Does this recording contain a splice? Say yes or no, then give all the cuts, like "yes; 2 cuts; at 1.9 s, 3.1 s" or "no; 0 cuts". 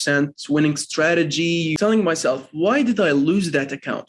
yes; 1 cut; at 1.7 s